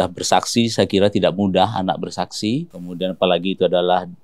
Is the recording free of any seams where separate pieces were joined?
no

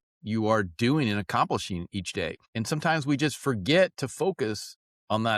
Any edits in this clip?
yes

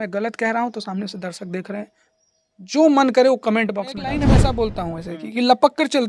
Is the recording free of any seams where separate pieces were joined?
no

